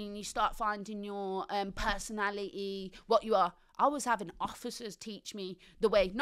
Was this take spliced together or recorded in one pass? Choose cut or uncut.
uncut